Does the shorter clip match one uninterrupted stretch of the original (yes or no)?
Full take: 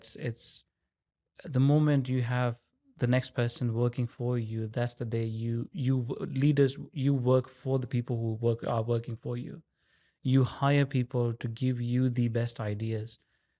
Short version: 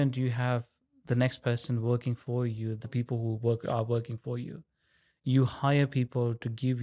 no